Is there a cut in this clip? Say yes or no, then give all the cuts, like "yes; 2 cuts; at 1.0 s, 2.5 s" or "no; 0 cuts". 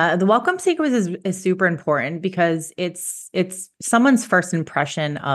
no; 0 cuts